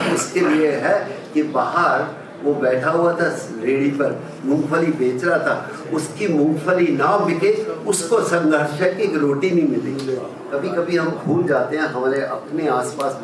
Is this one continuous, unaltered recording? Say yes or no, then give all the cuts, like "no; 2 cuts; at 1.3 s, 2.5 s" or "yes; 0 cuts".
no; 1 cut; at 10.4 s